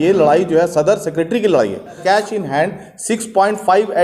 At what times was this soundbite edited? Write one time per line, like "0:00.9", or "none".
0:02.0